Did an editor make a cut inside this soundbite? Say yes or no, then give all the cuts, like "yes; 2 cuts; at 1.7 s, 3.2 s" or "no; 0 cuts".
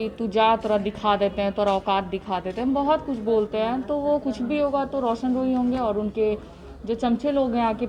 no; 0 cuts